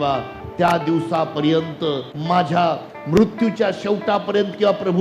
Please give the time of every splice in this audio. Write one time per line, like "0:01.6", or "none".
0:02.1